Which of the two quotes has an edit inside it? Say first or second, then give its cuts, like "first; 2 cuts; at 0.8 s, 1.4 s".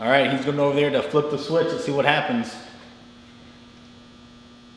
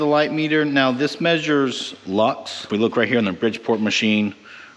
second; 1 cut; at 2.7 s